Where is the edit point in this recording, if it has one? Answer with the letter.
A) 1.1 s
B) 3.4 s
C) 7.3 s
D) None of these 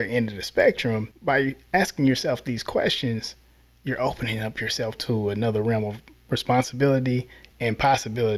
A